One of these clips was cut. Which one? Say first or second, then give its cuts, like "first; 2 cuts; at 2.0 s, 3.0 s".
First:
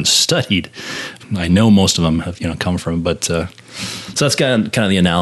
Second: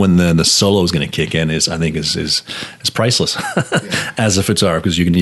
first; 1 cut; at 1.2 s